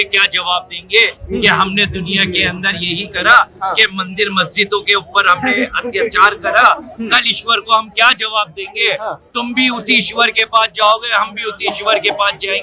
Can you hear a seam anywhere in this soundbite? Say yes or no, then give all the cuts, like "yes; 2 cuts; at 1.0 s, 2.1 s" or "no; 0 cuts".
no; 0 cuts